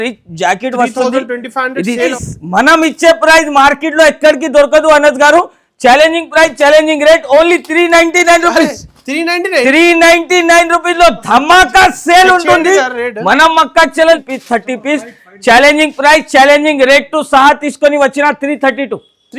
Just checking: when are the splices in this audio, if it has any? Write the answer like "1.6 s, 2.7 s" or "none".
2.1 s, 14.3 s